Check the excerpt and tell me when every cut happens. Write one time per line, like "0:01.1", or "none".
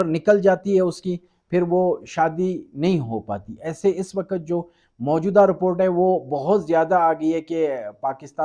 none